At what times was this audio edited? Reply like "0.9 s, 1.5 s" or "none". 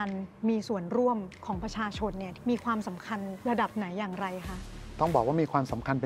2.2 s, 3.3 s